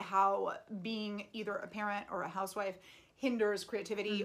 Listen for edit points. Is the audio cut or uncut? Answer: uncut